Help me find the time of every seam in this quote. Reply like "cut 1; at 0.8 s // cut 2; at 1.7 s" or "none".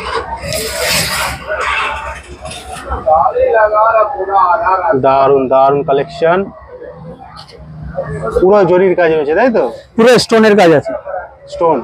none